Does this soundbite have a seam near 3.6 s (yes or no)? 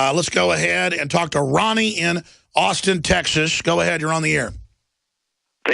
yes